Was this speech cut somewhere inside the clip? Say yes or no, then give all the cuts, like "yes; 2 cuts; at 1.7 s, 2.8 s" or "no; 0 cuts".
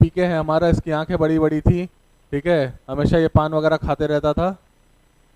no; 0 cuts